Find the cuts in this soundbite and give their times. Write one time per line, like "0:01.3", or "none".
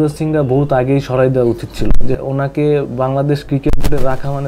0:02.2